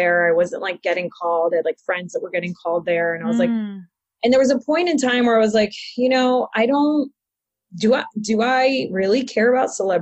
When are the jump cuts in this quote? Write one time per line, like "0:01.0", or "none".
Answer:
none